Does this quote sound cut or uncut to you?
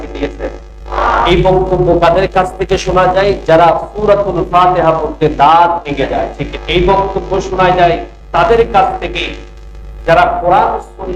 cut